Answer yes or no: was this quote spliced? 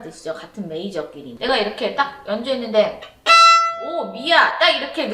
yes